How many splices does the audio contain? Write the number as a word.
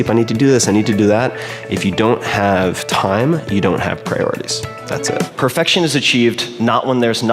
one